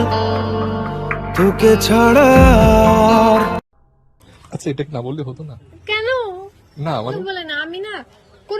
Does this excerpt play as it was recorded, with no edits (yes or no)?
no